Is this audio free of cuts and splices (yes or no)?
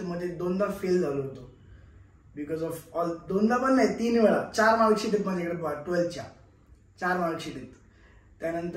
yes